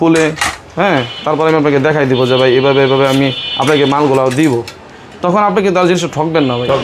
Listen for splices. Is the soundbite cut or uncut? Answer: uncut